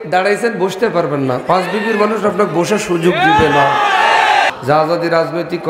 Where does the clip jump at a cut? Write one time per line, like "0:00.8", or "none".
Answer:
0:04.5